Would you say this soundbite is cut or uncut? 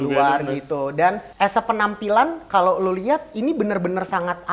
cut